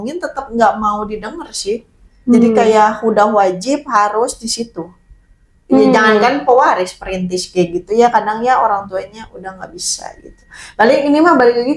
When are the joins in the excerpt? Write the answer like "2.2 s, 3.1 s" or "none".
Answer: none